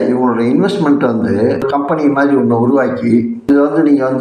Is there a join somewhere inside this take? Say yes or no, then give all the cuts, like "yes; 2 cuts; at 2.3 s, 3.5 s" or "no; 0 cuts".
yes; 2 cuts; at 1.7 s, 3.5 s